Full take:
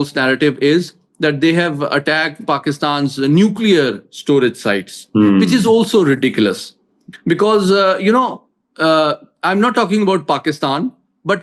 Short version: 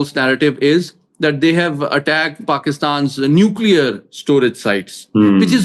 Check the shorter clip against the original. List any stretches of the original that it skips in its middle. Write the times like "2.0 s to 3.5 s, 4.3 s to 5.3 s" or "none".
none